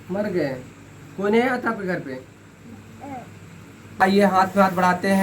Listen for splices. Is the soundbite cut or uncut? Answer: cut